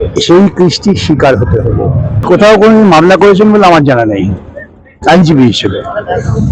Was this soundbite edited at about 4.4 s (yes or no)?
no